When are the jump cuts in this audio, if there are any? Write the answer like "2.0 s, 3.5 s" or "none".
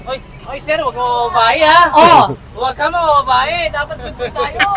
none